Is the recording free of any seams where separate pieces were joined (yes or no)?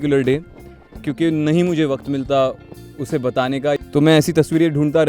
no